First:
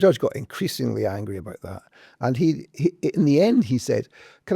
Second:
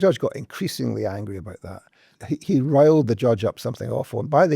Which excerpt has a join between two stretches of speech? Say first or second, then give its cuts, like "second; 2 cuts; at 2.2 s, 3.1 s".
second; 1 cut; at 2.1 s